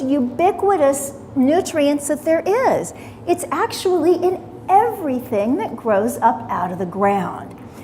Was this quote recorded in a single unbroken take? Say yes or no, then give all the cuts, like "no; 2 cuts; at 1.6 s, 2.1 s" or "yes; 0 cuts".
no; 1 cut; at 4.4 s